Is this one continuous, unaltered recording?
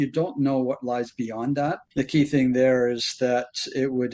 no; 1 cut; at 1.8 s

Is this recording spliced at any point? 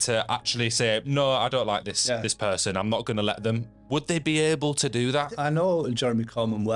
yes; 1 cut; at 5.3 s

